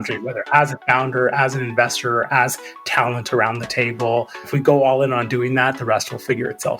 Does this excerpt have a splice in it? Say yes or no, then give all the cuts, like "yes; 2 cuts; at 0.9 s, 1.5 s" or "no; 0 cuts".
yes; 1 cut; at 4.5 s